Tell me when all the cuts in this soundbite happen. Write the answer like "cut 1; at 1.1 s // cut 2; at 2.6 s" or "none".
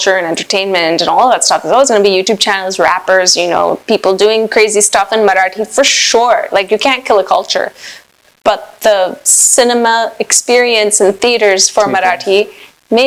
none